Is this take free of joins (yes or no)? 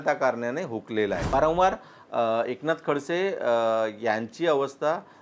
no